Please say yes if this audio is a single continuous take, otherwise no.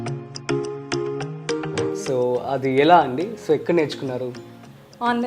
no